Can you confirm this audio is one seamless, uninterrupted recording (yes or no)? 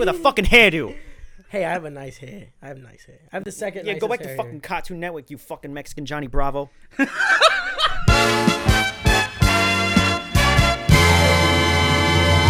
no